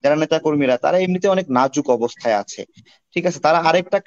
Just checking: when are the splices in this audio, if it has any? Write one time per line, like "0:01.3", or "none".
none